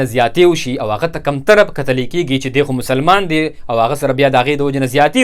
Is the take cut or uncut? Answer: uncut